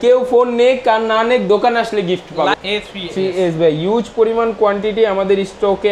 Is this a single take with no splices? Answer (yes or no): no